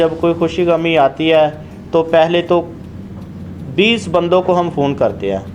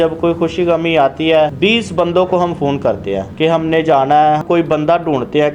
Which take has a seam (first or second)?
second